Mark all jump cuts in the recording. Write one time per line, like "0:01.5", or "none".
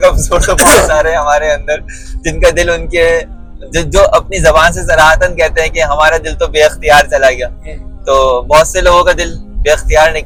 none